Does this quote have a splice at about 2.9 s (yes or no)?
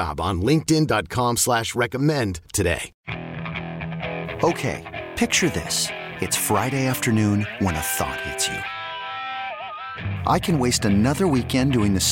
yes